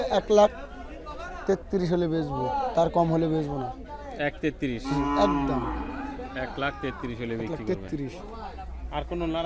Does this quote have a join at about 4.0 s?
no; 0 cuts

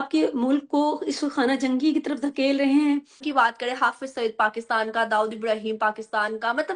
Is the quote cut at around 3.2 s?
yes; 1 cut; at 3.2 s

